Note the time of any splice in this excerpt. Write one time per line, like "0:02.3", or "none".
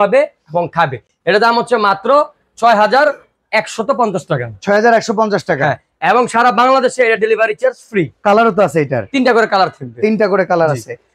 none